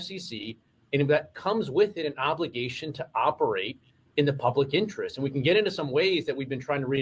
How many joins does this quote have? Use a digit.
0